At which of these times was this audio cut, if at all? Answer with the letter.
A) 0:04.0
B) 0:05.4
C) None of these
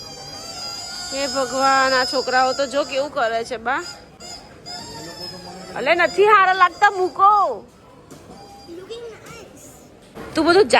C